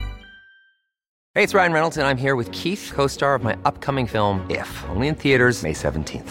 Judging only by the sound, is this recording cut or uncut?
cut